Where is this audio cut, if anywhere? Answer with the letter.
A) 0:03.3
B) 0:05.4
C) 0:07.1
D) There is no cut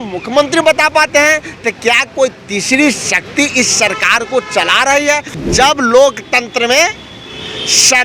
B